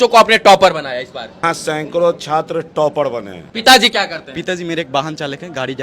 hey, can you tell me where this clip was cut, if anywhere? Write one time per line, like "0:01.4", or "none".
0:01.4
0:03.4